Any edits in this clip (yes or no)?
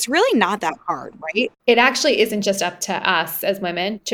yes